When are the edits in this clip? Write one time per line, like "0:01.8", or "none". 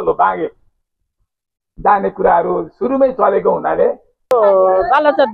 0:04.3